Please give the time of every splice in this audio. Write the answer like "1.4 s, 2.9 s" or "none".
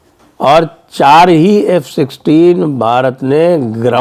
none

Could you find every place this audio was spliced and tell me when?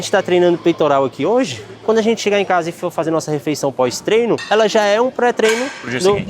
none

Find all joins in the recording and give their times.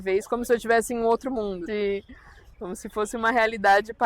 1.6 s

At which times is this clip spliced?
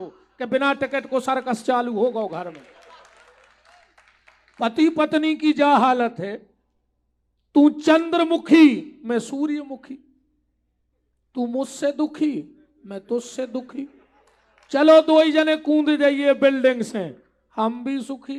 none

